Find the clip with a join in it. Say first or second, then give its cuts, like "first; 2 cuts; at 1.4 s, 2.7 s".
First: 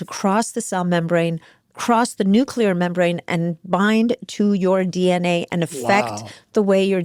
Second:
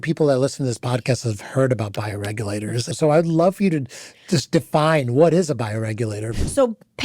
second; 2 cuts; at 2.9 s, 6.3 s